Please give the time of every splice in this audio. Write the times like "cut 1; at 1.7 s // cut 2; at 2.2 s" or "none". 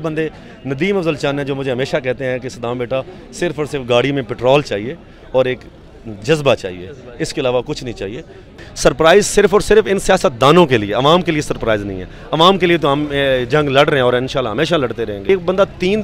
cut 1; at 8.6 s // cut 2; at 15.2 s